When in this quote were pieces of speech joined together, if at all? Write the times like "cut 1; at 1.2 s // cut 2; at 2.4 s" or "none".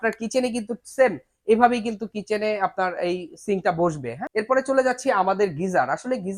cut 1; at 4.2 s